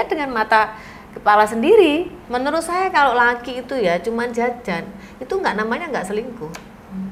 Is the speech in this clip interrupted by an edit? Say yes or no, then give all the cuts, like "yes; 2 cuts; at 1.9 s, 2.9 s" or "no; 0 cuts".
yes; 1 cut; at 2.2 s